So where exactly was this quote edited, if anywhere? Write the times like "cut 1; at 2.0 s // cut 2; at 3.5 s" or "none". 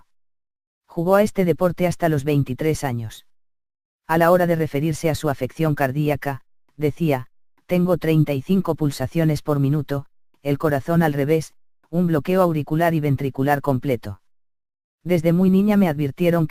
none

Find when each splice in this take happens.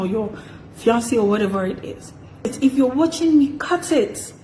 cut 1; at 2.5 s

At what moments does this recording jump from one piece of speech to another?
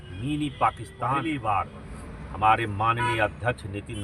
cut 1; at 1.1 s

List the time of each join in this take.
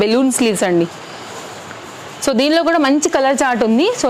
none

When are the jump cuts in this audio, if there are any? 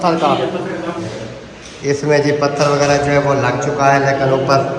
cut 1; at 1.1 s

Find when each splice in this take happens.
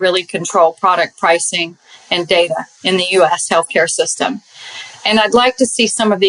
none

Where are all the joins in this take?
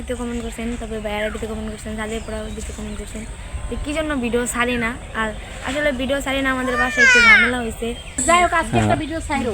cut 1; at 8.1 s

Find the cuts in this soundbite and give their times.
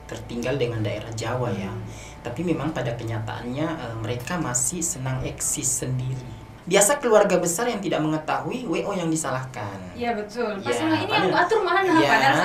cut 1; at 6.5 s

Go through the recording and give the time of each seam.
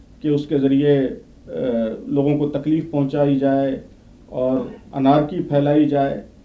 none

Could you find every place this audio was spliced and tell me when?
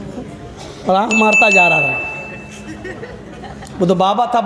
none

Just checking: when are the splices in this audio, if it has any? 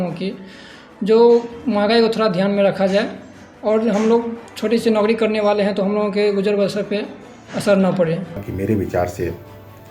cut 1; at 8.5 s

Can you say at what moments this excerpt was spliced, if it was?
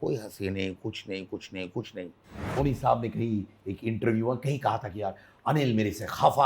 cut 1; at 2.4 s

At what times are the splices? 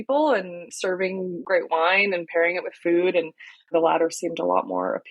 cut 1; at 1.4 s // cut 2; at 3.7 s

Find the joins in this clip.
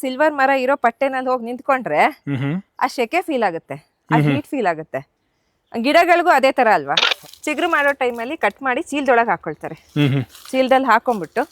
cut 1; at 7.1 s

